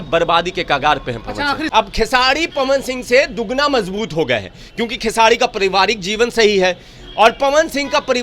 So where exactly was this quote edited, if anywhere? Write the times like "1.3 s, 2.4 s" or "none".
1.6 s